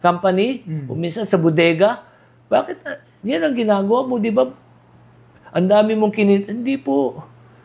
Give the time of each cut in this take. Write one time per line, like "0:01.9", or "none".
none